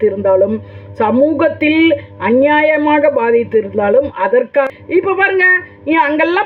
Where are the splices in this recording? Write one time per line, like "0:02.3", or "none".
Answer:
0:04.7